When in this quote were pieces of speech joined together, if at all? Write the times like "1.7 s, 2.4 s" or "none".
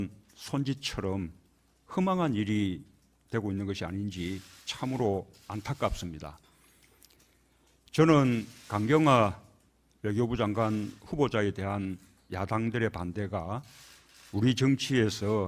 13.0 s